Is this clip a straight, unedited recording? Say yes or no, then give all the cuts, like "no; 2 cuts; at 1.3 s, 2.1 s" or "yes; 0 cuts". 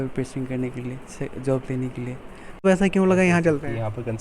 no; 1 cut; at 2.6 s